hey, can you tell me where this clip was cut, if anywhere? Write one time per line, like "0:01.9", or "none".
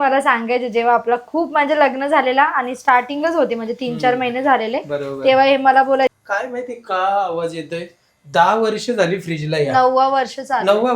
0:06.2